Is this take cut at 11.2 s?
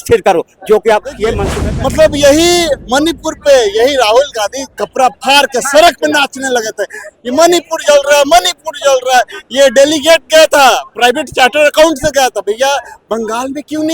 no; 1 cut; at 1.5 s

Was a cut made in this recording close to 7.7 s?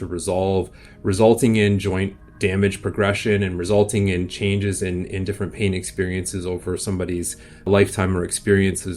yes; 1 cut; at 7.7 s

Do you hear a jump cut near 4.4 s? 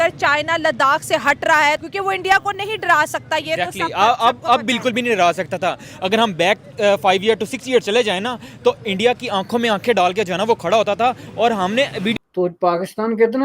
no; 2 cuts; at 1.9 s, 12.1 s

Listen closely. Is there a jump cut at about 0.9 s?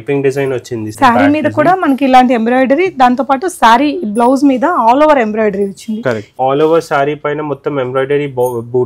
yes; 2 cuts; at 0.9 s, 6.3 s

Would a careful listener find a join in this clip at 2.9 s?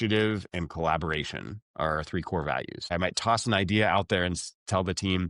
yes; 1 cut; at 2.9 s

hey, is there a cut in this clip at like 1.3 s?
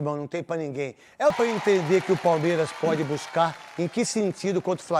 yes; 1 cut; at 1.3 s

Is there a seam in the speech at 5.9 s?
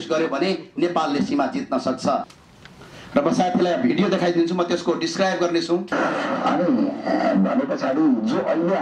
yes; 2 cuts; at 2.3 s, 5.9 s

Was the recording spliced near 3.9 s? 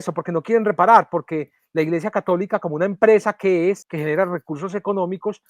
yes; 1 cut; at 3.9 s

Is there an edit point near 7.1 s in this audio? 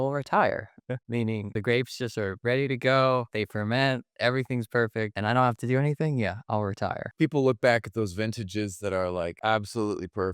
yes; 1 cut; at 7.1 s

